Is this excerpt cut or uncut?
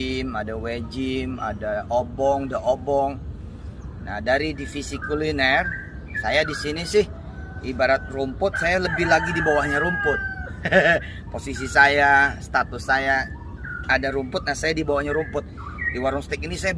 uncut